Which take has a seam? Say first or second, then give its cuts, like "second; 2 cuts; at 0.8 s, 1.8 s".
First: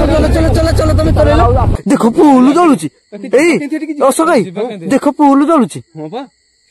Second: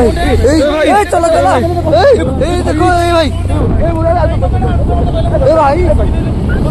first; 1 cut; at 1.7 s